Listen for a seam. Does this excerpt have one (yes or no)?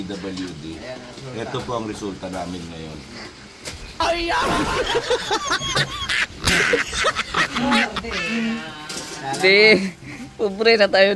no